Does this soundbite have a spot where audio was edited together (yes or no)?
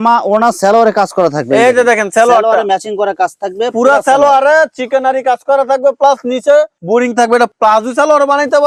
no